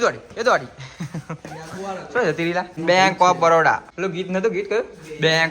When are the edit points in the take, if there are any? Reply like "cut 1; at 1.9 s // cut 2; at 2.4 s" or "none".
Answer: cut 1; at 2.8 s // cut 2; at 3.9 s